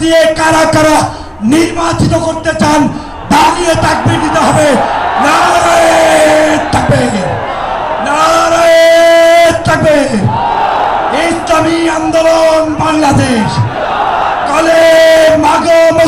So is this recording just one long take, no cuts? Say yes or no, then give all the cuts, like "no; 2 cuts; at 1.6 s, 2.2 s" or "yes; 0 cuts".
yes; 0 cuts